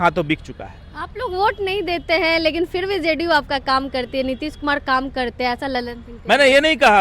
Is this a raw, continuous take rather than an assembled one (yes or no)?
yes